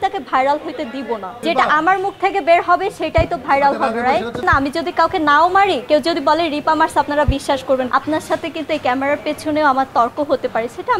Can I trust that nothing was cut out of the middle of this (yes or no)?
no